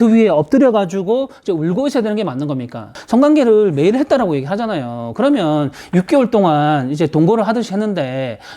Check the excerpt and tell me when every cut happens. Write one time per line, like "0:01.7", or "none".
0:02.9